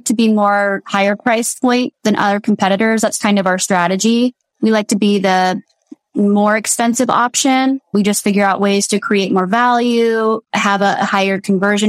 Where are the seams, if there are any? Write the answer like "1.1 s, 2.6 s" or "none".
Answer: none